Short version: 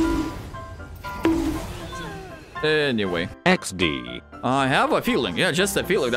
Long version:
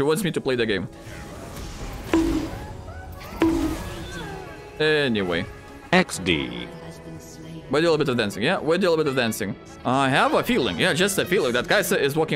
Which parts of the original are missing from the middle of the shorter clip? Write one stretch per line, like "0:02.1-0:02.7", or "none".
0:05.5-0:05.8
0:06.7-0:09.7